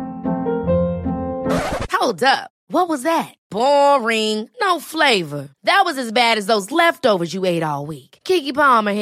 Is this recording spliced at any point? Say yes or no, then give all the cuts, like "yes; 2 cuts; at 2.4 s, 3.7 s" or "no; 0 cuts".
no; 0 cuts